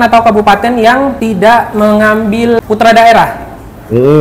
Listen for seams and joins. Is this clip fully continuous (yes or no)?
no